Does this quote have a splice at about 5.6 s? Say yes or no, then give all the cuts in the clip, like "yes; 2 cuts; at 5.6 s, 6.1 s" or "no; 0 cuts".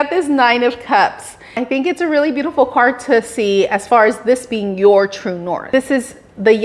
yes; 2 cuts; at 1.5 s, 5.6 s